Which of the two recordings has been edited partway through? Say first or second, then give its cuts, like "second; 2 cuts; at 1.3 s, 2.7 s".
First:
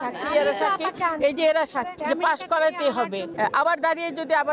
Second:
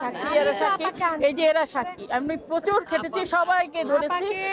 first; 2 cuts; at 2.0 s, 3.3 s